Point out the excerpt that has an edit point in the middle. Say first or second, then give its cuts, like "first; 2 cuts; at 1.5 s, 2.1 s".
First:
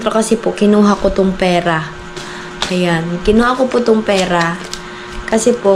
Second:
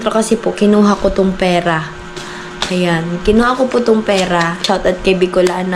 second; 1 cut; at 4.6 s